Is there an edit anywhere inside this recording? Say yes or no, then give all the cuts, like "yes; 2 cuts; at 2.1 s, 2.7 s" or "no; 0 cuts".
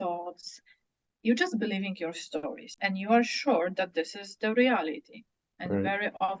yes; 1 cut; at 2.8 s